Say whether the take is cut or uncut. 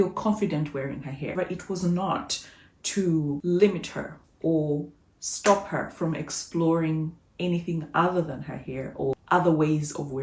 cut